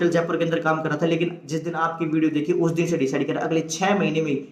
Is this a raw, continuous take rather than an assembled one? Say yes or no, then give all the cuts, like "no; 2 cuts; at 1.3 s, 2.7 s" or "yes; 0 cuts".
yes; 0 cuts